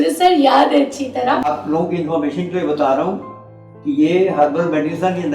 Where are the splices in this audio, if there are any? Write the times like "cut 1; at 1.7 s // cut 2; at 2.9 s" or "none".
cut 1; at 1.5 s